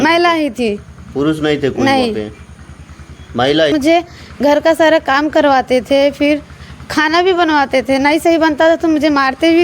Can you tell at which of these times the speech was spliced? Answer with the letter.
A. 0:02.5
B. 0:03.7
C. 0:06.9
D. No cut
B